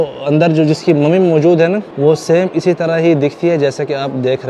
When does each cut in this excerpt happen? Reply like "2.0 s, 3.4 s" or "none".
1.9 s

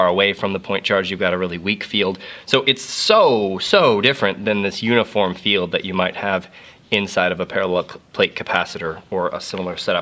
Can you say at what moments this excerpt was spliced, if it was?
7.5 s

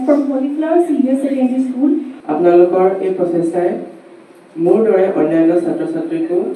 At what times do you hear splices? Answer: 2.1 s

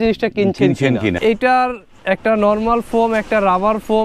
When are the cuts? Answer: 1.2 s

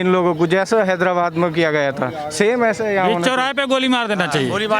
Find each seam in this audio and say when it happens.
none

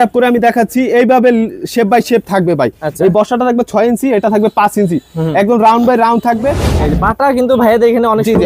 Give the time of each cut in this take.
6.7 s

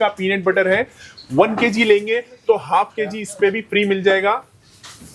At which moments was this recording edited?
none

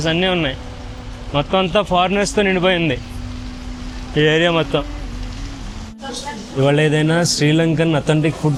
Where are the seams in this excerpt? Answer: none

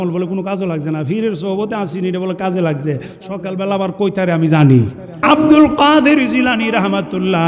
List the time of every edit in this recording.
5.2 s

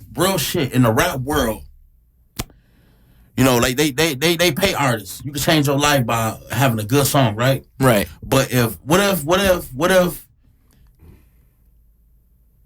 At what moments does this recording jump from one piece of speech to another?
none

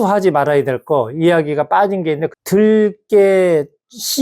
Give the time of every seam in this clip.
2.3 s

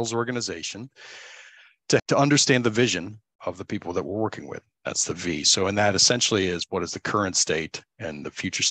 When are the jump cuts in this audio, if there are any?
2.0 s, 3.4 s

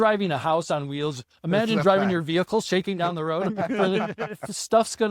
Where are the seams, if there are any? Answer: none

